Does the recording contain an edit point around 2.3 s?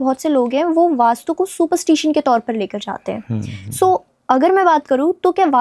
no; 0 cuts

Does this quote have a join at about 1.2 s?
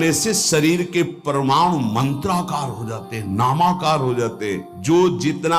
no; 1 cut; at 4.6 s

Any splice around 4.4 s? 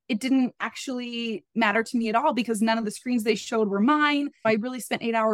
yes; 1 cut; at 4.4 s

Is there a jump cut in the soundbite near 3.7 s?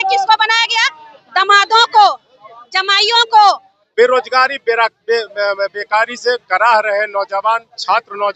yes; 1 cut; at 3.7 s

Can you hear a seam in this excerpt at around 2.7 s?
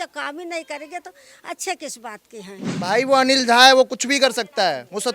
yes; 1 cut; at 2.7 s

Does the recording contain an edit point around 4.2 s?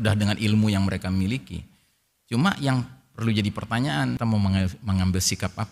yes; 1 cut; at 4.2 s

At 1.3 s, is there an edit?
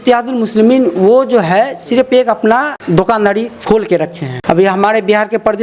no; 3 cuts; at 2.8 s, 3.5 s, 4.3 s

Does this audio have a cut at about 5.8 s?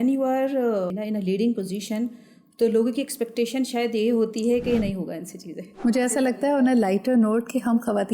yes; 2 cuts; at 0.9 s, 5.8 s

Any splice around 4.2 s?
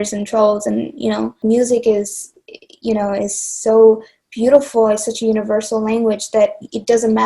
no; 1 cut; at 1.4 s

